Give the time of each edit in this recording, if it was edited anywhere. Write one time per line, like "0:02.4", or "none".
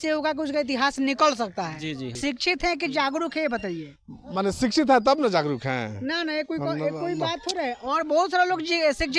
0:02.2